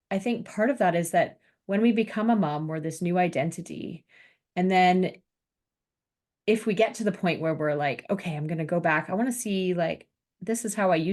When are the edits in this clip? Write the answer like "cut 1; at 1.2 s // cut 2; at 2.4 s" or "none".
none